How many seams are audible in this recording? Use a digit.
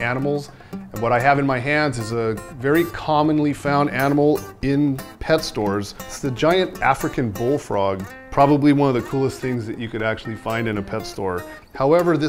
1